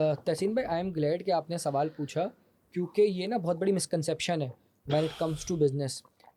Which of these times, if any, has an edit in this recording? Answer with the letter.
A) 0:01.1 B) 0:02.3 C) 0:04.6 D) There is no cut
D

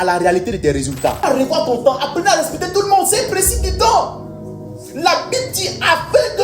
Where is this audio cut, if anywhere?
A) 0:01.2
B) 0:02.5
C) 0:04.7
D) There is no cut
A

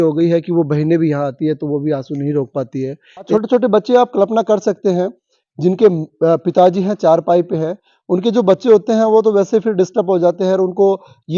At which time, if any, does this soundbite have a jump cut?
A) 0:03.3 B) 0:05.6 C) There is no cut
A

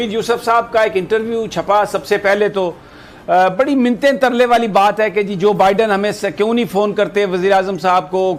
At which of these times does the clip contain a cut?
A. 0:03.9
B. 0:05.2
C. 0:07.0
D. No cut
D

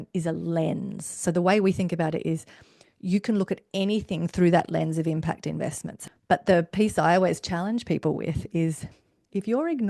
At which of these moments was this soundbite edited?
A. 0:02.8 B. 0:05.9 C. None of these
B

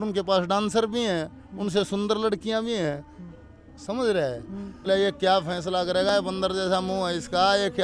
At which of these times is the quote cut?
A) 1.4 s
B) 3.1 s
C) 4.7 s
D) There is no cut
C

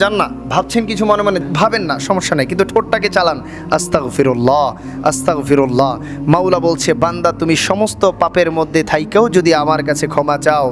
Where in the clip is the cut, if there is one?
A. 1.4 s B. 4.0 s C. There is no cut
A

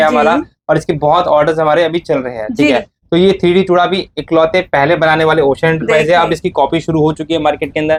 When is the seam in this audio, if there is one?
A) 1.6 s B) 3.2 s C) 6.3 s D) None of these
D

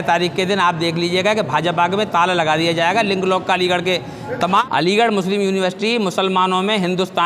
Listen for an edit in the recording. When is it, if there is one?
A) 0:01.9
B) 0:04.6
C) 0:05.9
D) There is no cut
B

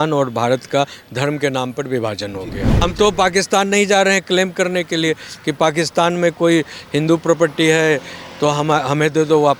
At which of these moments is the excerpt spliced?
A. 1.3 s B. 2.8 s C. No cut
B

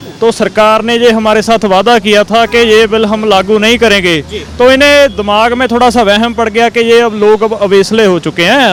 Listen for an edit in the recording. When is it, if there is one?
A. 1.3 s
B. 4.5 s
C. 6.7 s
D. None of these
D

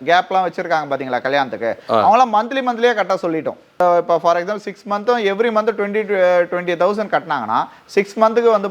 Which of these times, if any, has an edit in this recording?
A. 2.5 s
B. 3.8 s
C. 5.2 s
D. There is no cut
B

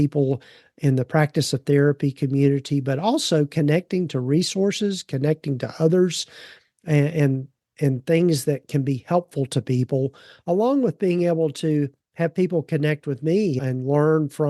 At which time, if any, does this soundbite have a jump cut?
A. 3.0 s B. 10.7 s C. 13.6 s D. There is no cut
C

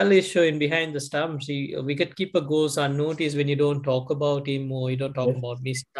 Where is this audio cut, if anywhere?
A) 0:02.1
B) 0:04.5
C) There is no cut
C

